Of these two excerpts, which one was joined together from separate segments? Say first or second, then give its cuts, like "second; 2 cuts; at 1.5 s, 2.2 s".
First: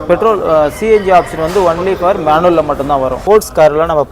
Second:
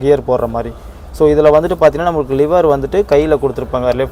first; 1 cut; at 3.2 s